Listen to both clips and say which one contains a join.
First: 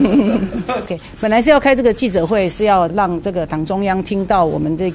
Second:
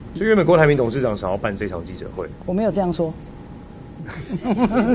first; 2 cuts; at 1.0 s, 2.9 s

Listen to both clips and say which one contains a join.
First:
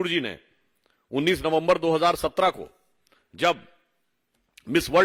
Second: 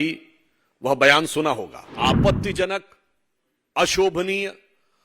second; 1 cut; at 1.9 s

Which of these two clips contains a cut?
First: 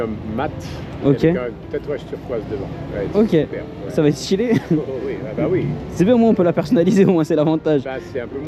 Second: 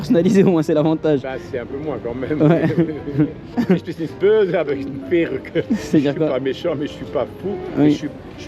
second; 1 cut; at 3.4 s

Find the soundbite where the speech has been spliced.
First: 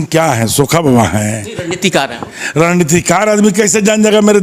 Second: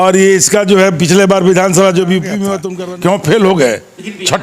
second; 1 cut; at 2.6 s

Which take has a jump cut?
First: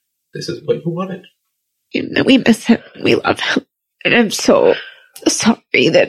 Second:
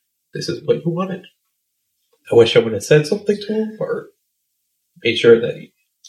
first; 1 cut; at 2.0 s

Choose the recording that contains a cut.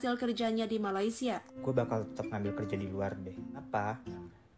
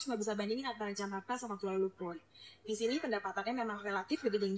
first; 1 cut; at 1.5 s

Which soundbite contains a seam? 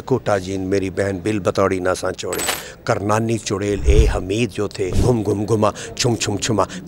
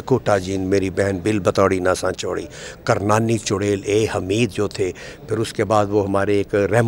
first; 1 cut; at 5.0 s

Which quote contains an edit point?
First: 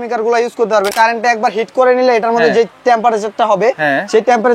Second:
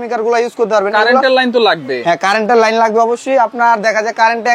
first; 1 cut; at 0.9 s

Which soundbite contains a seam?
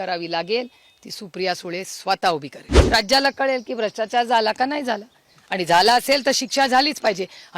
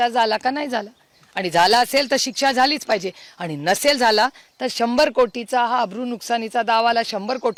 first; 1 cut; at 2.8 s

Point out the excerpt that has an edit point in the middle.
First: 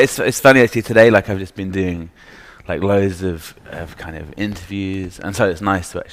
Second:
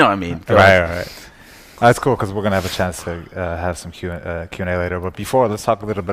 second; 1 cut; at 2.7 s

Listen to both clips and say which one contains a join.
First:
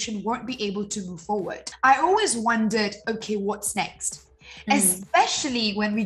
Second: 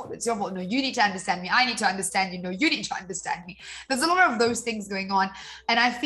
first; 1 cut; at 1.6 s

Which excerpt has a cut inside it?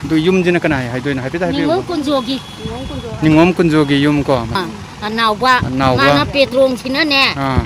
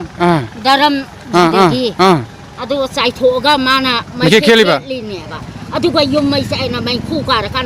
first; 1 cut; at 4.5 s

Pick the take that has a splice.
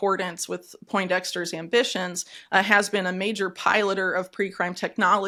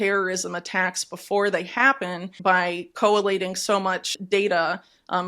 second; 2 cuts; at 2.3 s, 4.1 s

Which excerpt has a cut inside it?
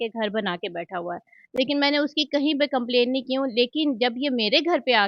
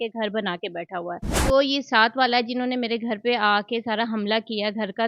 second; 1 cut; at 1.4 s

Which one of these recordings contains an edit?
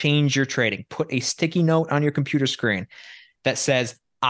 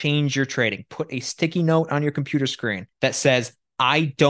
second; 1 cut; at 2.8 s

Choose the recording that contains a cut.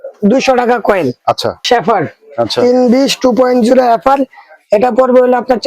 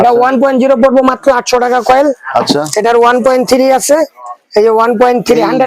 first; 1 cut; at 1.6 s

